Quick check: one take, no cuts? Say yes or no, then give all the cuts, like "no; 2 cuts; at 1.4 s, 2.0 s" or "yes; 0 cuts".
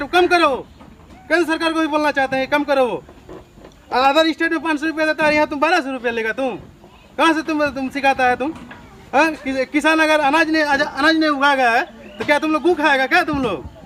yes; 0 cuts